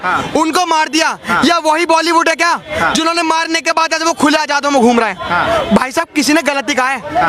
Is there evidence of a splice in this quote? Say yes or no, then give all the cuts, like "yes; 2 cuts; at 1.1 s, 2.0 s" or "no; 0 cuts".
no; 0 cuts